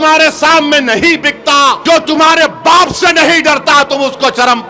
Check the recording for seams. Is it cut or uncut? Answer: cut